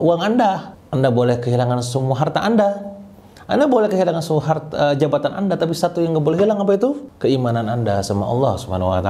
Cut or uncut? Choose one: uncut